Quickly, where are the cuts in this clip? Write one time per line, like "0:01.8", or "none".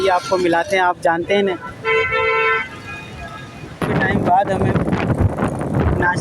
0:03.8